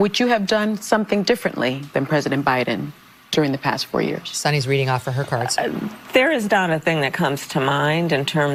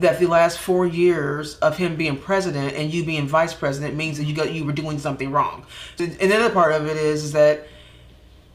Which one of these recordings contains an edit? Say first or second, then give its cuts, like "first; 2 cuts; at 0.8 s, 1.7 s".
second; 1 cut; at 6.0 s